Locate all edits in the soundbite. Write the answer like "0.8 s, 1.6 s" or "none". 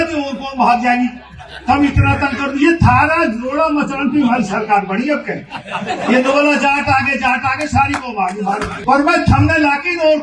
8.8 s